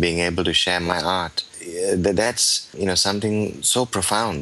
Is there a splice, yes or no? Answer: yes